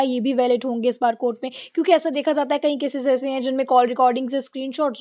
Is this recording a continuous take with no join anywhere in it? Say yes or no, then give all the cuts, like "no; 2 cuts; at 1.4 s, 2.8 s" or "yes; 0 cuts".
yes; 0 cuts